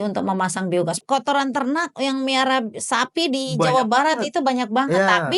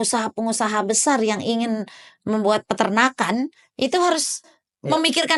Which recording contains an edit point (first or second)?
first